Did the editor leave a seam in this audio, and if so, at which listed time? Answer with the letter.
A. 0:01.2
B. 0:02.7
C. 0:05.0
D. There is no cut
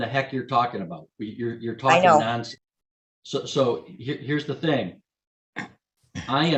D